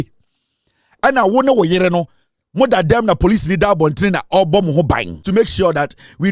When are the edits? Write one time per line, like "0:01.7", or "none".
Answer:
0:05.2